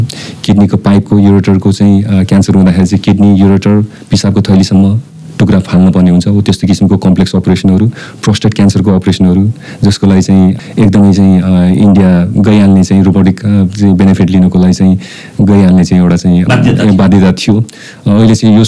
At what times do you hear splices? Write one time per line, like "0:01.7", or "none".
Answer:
0:10.6
0:12.3
0:16.5